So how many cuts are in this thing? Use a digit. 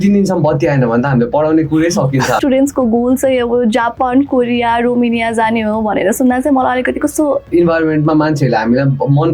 2